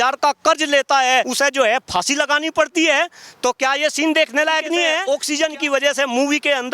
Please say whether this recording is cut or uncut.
cut